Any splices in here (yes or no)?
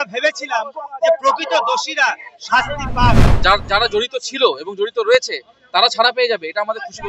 yes